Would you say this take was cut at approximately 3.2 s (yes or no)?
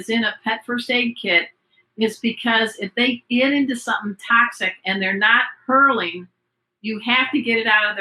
no